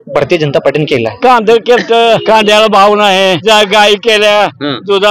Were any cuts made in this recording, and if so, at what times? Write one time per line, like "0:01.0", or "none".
0:01.2
0:02.2
0:03.4